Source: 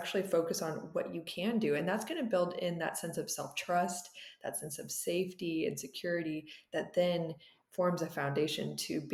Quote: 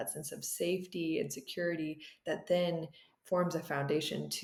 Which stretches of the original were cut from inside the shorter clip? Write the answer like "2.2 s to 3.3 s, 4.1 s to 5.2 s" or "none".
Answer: none